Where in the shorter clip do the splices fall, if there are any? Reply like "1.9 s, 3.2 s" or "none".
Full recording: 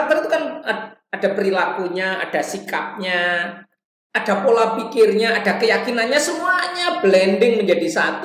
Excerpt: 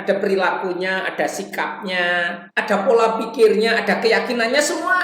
2.4 s